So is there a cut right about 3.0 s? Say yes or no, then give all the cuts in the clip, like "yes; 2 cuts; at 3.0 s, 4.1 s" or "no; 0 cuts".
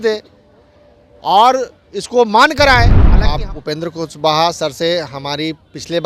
yes; 1 cut; at 3.0 s